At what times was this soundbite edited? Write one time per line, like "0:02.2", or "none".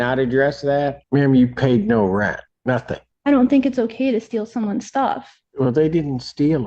0:01.0
0:02.8
0:05.4